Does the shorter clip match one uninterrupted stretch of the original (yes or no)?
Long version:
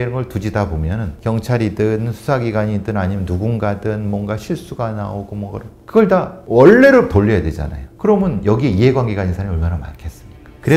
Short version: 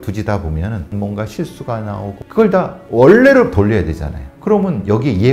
no